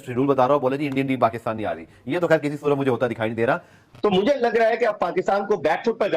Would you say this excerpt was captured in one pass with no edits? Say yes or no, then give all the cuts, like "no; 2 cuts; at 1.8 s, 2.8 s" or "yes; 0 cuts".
no; 1 cut; at 4.0 s